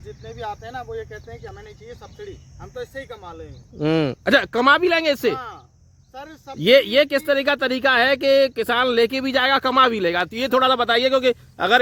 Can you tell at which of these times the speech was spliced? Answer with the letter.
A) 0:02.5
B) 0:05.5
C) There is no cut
C